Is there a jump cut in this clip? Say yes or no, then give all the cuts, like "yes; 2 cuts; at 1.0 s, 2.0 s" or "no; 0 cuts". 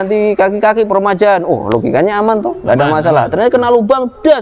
no; 0 cuts